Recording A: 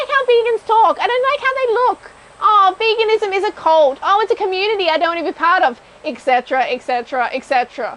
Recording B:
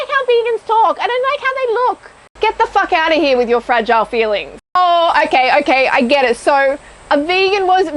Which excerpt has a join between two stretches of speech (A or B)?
B